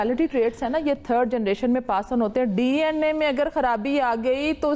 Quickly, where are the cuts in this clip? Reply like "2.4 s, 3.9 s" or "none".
none